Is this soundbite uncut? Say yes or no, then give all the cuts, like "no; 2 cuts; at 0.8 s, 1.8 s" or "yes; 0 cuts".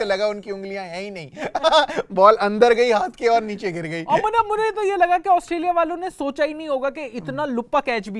yes; 0 cuts